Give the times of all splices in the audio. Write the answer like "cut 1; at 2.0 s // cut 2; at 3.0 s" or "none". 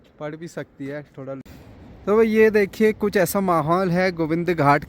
cut 1; at 1.4 s

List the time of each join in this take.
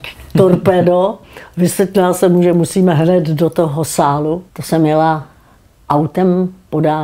cut 1; at 4.5 s

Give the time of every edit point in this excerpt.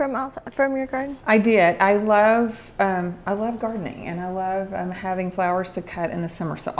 none

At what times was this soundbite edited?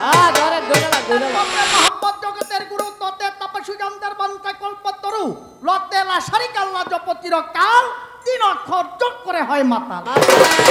cut 1; at 1.3 s

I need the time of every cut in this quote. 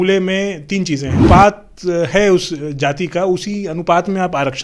cut 1; at 1.2 s

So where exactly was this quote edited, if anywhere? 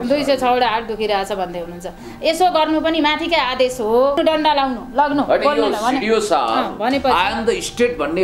cut 1; at 4.2 s

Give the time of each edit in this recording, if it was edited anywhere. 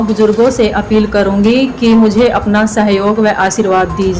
none

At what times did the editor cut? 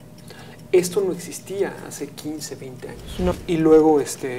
cut 1; at 3.3 s

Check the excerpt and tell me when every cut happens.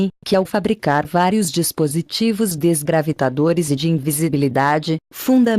cut 1; at 3.3 s

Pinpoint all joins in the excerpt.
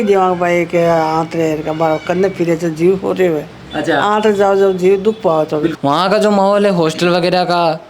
cut 1; at 5.7 s

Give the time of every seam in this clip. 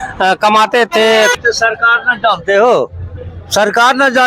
cut 1; at 1.3 s

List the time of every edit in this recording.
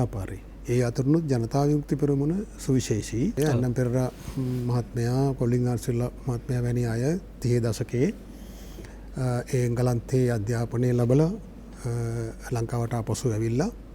cut 1; at 3.3 s

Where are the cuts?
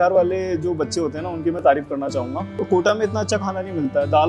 cut 1; at 2.5 s

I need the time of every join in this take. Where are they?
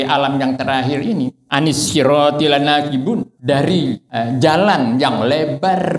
cut 1; at 1.4 s // cut 2; at 3.3 s // cut 3; at 4.0 s

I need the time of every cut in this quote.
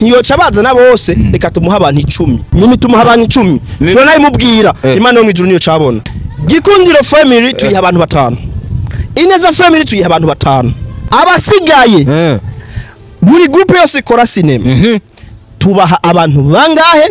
cut 1; at 2.5 s // cut 2; at 6.0 s // cut 3; at 11.0 s

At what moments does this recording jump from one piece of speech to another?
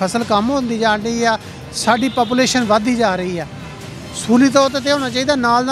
none

